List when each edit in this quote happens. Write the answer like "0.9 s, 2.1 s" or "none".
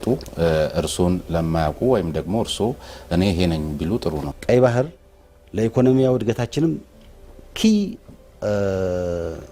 4.3 s